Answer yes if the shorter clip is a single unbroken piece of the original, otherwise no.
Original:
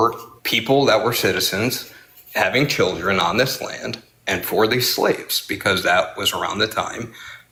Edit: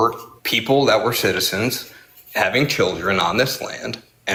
yes